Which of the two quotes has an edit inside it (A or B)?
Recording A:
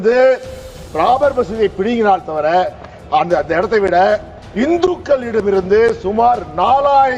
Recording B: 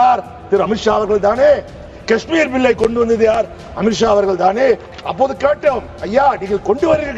B